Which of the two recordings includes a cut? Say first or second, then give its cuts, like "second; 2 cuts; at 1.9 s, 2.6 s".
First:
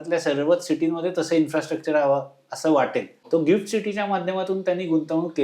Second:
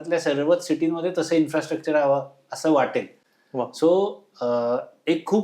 first; 1 cut; at 3.2 s